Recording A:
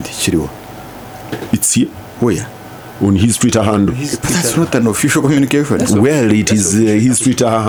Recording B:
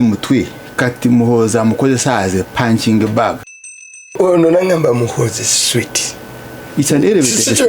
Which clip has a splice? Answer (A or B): B